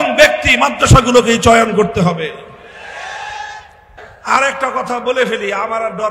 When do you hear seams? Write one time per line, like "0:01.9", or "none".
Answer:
0:04.0